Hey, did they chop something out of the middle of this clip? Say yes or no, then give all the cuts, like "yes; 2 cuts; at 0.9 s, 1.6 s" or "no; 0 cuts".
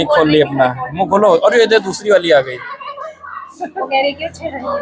no; 0 cuts